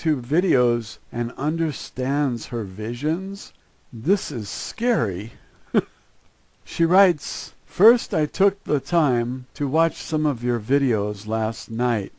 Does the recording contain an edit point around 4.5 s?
no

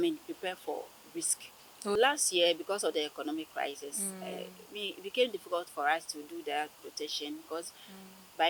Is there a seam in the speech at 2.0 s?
yes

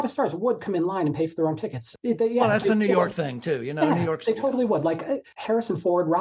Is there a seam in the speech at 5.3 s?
yes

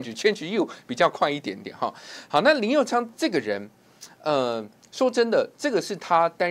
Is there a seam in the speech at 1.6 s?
no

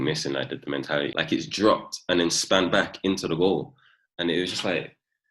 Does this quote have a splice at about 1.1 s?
yes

